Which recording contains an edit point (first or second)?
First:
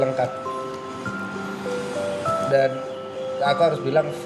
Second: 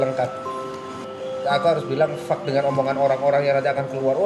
second